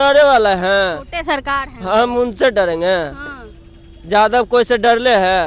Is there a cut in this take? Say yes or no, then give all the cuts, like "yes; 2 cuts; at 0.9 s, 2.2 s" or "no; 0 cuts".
no; 0 cuts